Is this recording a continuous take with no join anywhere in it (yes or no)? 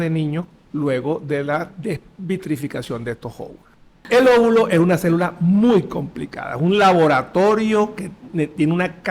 no